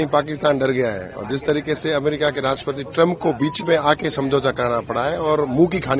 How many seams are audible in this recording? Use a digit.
0